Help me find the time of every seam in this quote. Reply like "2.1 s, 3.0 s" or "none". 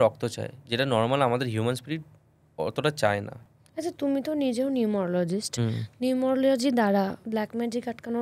3.3 s